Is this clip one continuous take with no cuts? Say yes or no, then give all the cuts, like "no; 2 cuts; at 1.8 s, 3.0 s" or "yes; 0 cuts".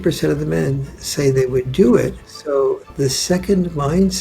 no; 1 cut; at 2.7 s